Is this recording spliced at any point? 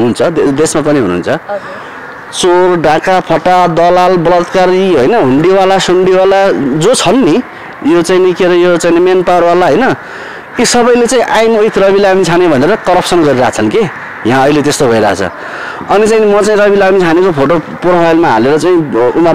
no; 0 cuts

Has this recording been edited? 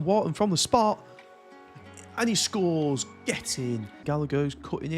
yes; 1 cut; at 4.0 s

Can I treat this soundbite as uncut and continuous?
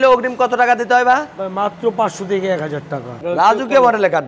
no; 1 cut; at 3.1 s

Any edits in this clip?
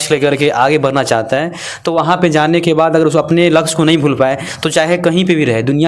no; 0 cuts

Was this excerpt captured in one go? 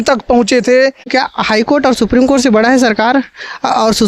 no; 1 cut; at 1.1 s

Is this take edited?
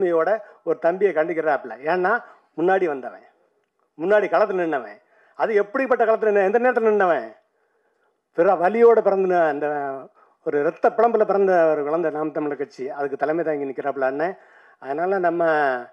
no; 0 cuts

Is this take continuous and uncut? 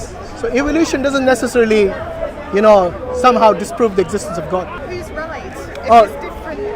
no; 1 cut; at 4.8 s

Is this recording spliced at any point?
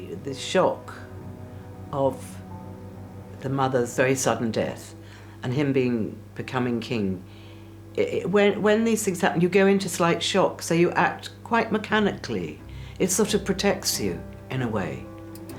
yes; 1 cut; at 3.9 s

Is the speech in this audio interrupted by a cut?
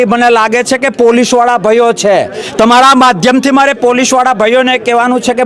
no; 0 cuts

